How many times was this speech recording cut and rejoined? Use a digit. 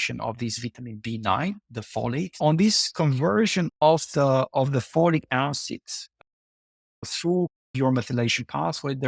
1